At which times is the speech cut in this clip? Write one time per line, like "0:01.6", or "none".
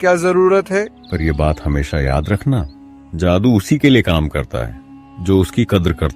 0:01.0